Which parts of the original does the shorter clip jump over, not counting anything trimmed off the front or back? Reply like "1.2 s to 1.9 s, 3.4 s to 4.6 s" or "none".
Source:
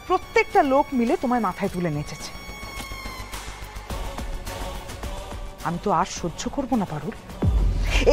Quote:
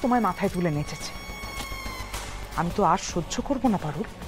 3.6 s to 5.5 s